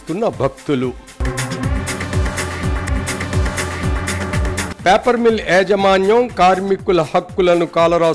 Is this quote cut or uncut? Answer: uncut